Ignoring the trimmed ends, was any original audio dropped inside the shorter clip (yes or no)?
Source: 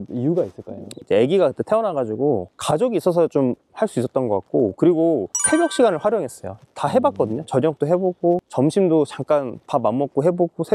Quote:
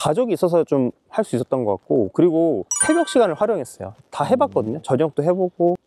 no